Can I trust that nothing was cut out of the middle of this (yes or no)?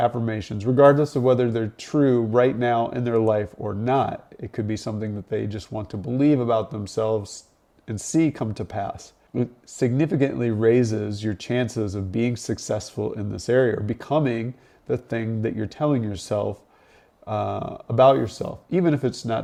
yes